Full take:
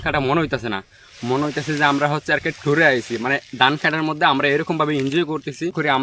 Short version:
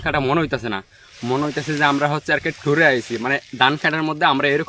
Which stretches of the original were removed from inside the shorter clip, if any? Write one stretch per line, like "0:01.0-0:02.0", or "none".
none